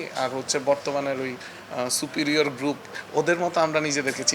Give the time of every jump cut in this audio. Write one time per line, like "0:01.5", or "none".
0:02.9